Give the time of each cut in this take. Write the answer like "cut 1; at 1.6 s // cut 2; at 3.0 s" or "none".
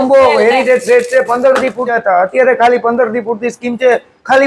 cut 1; at 2.2 s